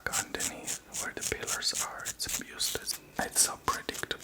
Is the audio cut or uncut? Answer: cut